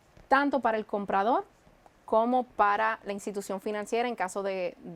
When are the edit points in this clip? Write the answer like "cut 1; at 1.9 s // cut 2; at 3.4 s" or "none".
none